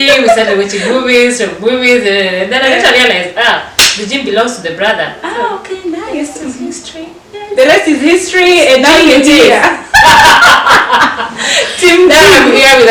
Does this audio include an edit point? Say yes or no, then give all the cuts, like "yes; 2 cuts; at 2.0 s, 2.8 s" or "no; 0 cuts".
no; 0 cuts